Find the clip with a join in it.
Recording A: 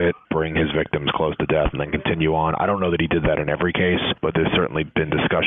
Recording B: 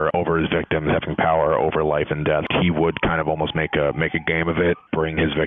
B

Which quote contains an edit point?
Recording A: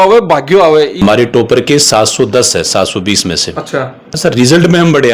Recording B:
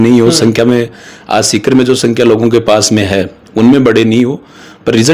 A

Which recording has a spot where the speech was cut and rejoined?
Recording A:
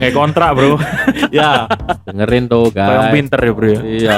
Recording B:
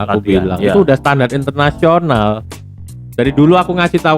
A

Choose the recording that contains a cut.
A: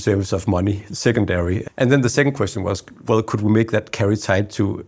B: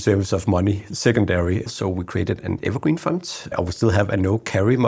B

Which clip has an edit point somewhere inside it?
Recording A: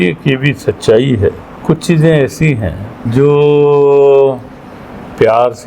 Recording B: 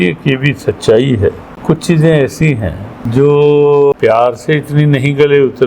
B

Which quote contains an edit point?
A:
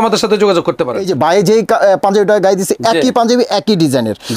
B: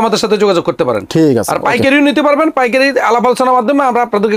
A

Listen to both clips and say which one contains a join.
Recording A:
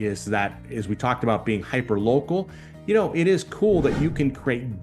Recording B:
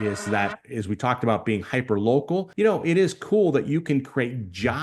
B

